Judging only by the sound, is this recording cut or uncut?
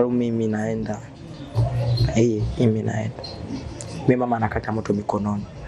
uncut